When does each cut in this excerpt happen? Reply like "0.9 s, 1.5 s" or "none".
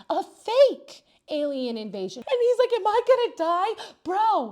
2.1 s